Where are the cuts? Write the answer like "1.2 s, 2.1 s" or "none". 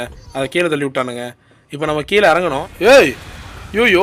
2.7 s

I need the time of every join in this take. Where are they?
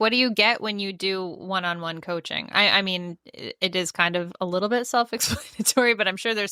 none

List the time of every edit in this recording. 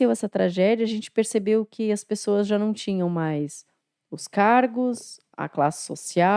none

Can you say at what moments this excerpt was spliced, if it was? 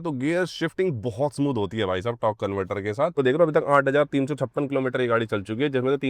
3.1 s

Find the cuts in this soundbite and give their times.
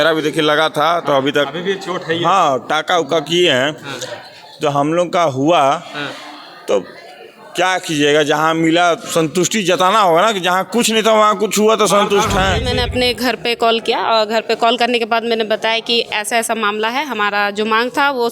12.7 s

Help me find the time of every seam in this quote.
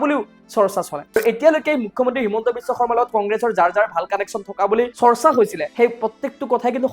1.2 s, 4.9 s, 5.6 s

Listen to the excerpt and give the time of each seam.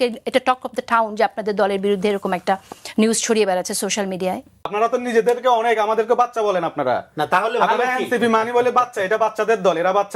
4.7 s

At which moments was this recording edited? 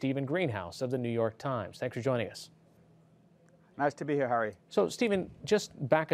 none

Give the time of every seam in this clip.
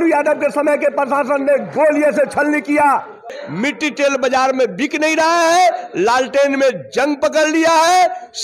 3.4 s

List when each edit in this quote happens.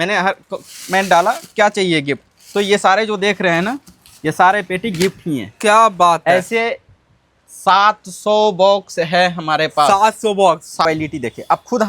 10.9 s

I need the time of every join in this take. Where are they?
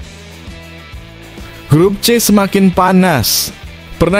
1.7 s

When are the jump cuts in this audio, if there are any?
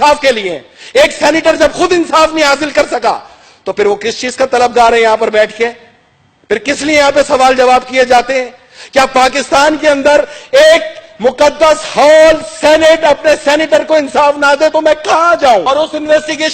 15.6 s

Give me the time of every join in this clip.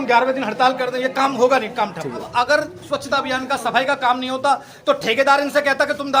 2.2 s

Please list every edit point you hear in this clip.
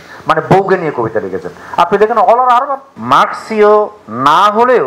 2.9 s

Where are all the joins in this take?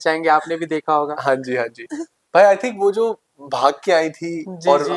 none

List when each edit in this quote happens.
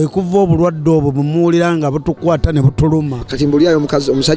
3.2 s

